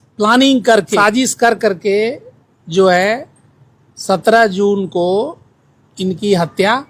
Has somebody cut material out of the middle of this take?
yes; 1 cut; at 1.0 s

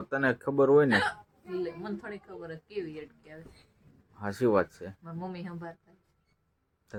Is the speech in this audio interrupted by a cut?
no; 0 cuts

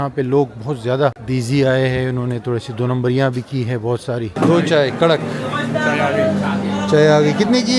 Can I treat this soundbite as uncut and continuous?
no; 2 cuts; at 1.2 s, 4.3 s

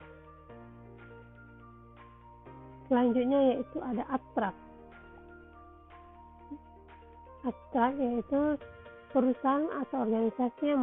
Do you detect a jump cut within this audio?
yes; 1 cut; at 2.9 s

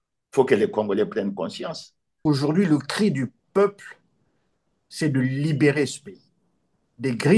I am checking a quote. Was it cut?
yes; 1 cut; at 2.2 s

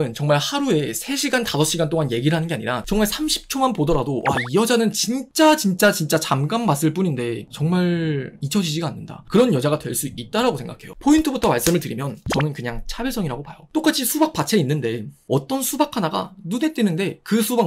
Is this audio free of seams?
no; 2 cuts; at 10.8 s, 13.5 s

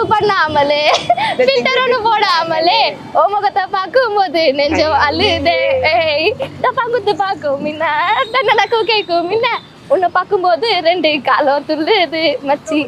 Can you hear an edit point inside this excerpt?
no; 0 cuts

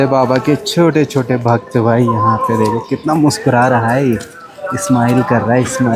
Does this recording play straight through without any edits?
yes; 0 cuts

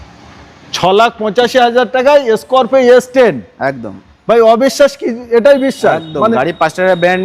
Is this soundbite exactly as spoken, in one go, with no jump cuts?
yes; 0 cuts

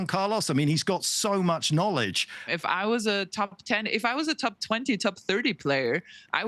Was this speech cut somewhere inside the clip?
yes; 1 cut; at 2.4 s

